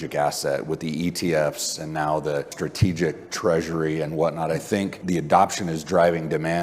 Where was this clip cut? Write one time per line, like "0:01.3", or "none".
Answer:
0:02.5
0:05.0